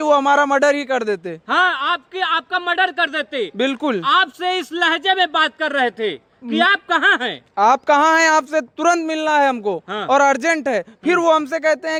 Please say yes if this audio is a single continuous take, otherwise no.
yes